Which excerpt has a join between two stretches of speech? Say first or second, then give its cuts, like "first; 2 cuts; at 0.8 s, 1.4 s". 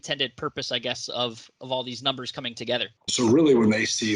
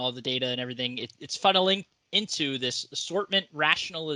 first; 1 cut; at 3.1 s